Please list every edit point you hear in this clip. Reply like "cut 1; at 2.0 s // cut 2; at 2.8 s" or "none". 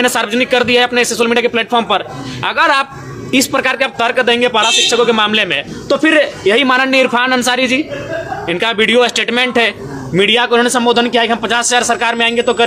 none